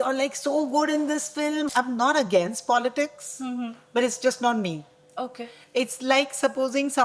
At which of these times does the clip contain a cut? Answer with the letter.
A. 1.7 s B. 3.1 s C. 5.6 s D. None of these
A